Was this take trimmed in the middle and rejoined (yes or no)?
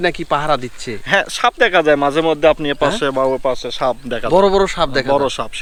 no